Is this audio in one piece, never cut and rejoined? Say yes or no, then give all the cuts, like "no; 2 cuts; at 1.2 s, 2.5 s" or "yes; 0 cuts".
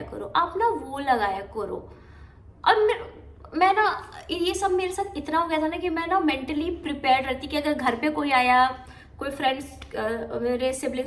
yes; 0 cuts